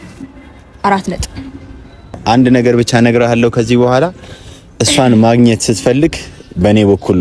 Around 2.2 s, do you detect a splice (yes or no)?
yes